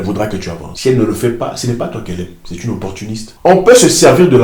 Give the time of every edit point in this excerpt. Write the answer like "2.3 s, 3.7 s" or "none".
3.2 s

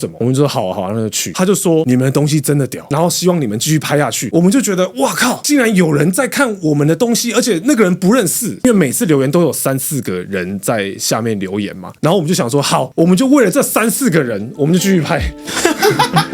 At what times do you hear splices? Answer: 1.3 s, 4.3 s, 8.6 s

